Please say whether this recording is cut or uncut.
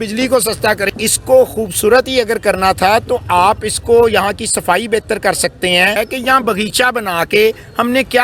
cut